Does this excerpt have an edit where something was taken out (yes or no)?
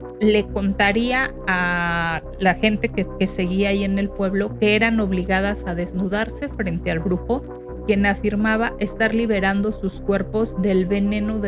no